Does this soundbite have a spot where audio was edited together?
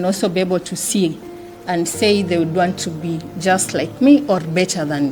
no; 0 cuts

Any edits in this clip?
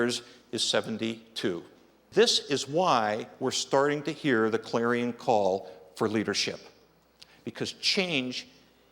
yes; 1 cut; at 2.1 s

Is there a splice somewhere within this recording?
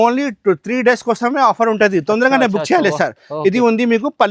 no; 0 cuts

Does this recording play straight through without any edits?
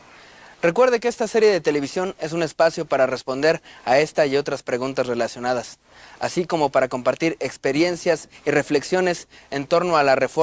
yes; 0 cuts

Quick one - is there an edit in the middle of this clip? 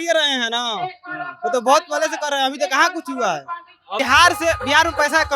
yes; 1 cut; at 3.9 s

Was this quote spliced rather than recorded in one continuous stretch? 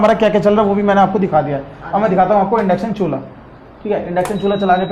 no; 0 cuts

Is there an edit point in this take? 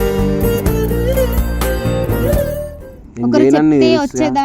no; 0 cuts

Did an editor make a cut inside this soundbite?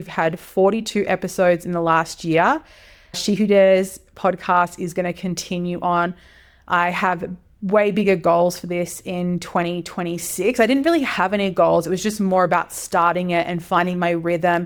no; 0 cuts

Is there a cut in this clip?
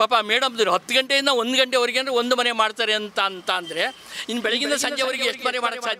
no; 0 cuts

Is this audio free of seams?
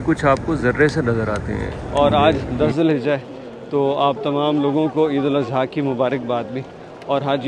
no; 1 cut; at 2.2 s

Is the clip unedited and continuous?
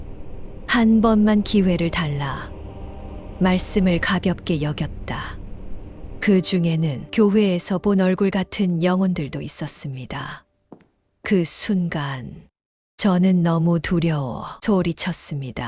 yes; 0 cuts

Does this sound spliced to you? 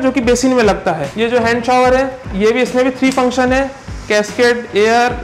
yes; 1 cut; at 1.1 s

